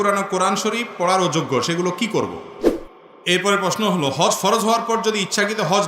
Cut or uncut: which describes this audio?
cut